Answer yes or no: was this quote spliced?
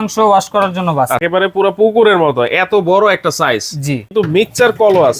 yes